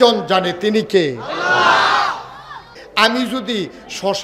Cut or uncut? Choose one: cut